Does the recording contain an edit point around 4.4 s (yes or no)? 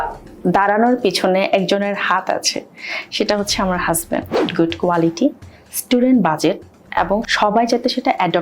yes